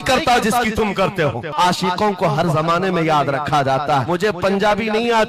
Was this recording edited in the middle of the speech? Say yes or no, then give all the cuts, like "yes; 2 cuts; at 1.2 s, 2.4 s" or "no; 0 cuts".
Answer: yes; 2 cuts; at 1.5 s, 4.0 s